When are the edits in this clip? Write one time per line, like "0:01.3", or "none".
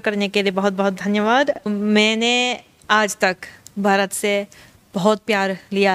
0:01.6